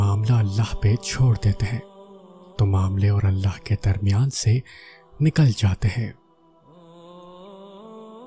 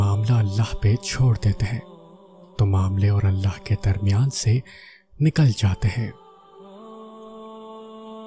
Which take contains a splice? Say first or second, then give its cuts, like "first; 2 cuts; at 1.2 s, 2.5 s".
second; 1 cut; at 6.4 s